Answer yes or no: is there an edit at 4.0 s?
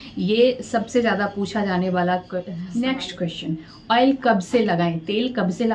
no